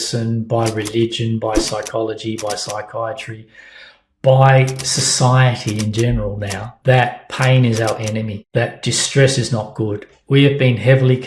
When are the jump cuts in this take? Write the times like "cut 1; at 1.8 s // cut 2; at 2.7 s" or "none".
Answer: cut 1; at 6.7 s // cut 2; at 8.4 s